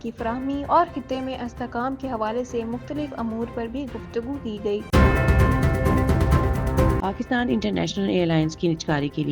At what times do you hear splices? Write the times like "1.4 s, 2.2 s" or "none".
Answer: 4.9 s, 7.0 s